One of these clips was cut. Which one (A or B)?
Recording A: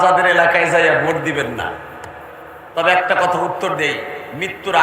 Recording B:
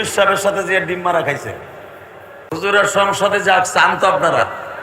B